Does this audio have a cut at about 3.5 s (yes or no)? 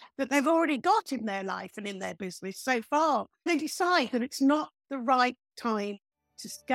yes